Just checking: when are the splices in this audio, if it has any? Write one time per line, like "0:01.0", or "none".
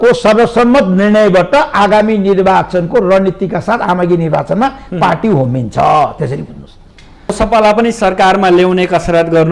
0:07.3